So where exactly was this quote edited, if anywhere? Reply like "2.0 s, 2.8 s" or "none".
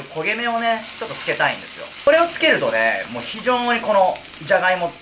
none